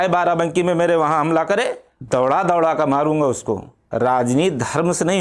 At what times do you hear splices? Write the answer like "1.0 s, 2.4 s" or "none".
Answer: 1.9 s, 3.8 s